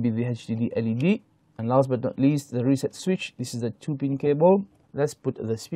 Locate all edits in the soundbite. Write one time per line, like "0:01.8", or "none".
0:04.8